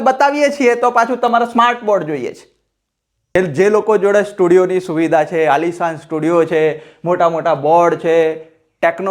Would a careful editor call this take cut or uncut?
cut